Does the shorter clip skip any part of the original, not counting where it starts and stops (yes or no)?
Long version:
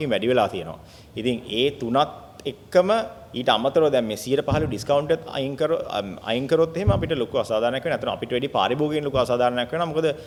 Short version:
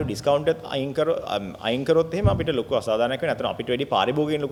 no